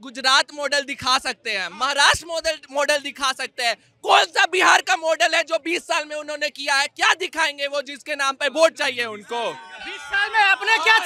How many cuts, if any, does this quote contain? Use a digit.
0